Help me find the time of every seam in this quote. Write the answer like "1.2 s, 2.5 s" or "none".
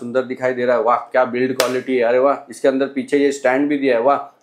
none